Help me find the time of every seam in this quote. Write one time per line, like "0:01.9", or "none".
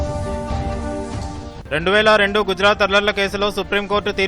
0:01.5